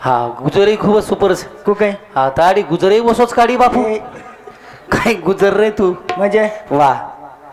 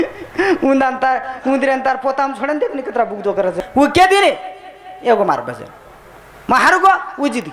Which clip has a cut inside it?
second; 1 cut; at 3.6 s

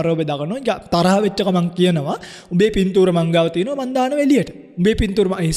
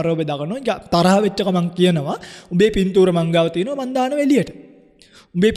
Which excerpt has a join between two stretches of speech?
first; 1 cut; at 4.6 s

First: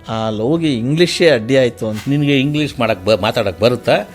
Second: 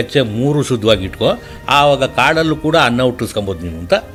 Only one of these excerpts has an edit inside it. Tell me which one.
first; 1 cut; at 2.0 s

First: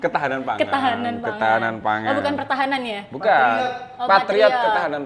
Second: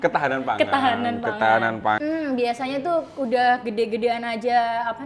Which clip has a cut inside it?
second; 1 cut; at 2.0 s

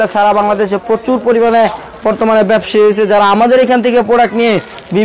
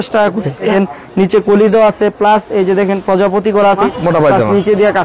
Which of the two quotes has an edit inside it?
second; 2 cuts; at 0.7 s, 3.9 s

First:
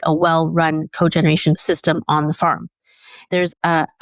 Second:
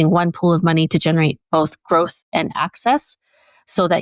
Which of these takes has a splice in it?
first; 2 cuts; at 1.6 s, 3.2 s

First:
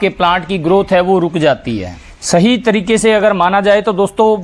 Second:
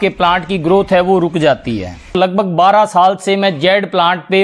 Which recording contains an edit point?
second; 1 cut; at 2.2 s

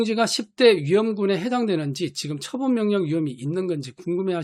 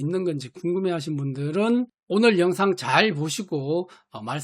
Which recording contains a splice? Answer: second; 1 cut; at 2.0 s

